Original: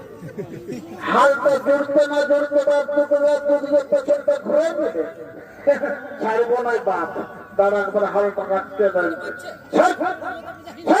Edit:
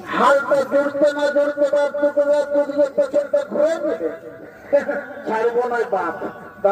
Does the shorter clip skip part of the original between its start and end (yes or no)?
no